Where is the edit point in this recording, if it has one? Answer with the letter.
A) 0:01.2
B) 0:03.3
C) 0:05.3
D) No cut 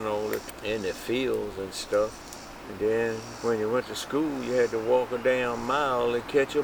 B